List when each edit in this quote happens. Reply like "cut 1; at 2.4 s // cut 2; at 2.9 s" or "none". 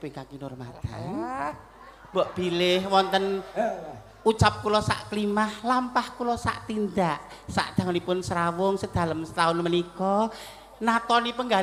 none